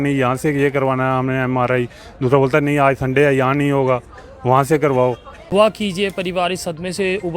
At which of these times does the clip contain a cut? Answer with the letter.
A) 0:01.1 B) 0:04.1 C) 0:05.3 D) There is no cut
C